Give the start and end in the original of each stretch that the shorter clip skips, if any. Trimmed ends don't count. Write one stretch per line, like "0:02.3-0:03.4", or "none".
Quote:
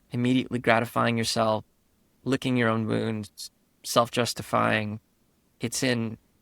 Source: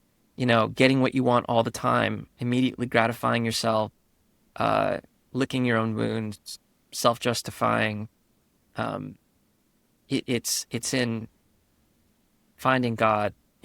0:04.3-0:05.2
0:08.5-0:10.6